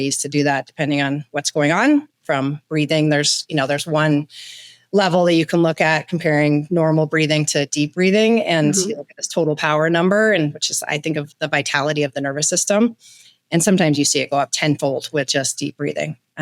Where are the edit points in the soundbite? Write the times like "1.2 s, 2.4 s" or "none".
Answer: none